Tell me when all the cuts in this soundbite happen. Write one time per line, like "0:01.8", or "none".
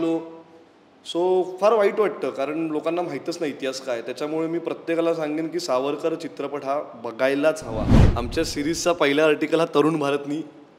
0:08.0